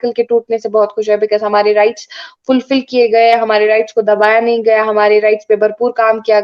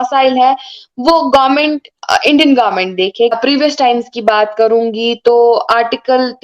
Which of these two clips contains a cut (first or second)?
second